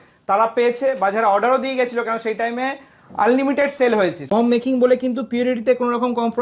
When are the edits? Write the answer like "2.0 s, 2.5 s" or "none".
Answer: 4.2 s